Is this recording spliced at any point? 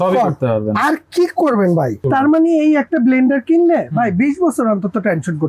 yes; 1 cut; at 2.0 s

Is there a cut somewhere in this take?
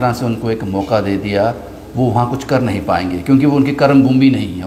no; 0 cuts

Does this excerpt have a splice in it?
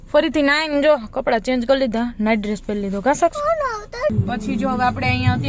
yes; 1 cut; at 4.1 s

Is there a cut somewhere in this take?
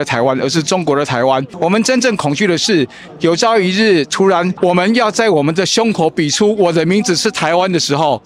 yes; 2 cuts; at 1.5 s, 4.5 s

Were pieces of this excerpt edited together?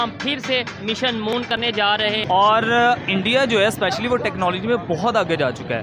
yes; 1 cut; at 2.2 s

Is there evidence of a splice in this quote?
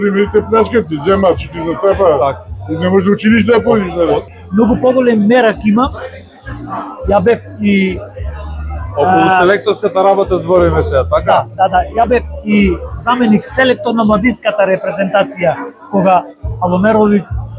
yes; 1 cut; at 4.3 s

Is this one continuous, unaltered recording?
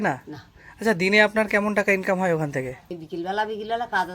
no; 1 cut; at 3.0 s

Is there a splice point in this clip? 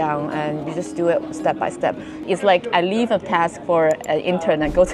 yes; 1 cut; at 2.2 s

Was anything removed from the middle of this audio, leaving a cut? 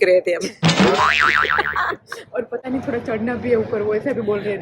no; 0 cuts

